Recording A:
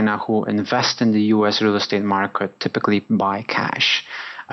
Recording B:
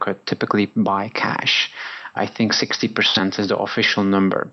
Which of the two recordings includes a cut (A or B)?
B